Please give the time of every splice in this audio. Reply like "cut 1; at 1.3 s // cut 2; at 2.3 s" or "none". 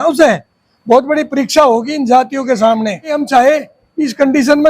cut 1; at 3.2 s